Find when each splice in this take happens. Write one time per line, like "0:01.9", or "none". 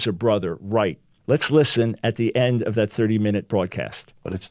0:01.1